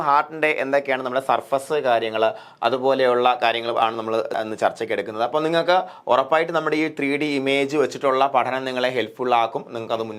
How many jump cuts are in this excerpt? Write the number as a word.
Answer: one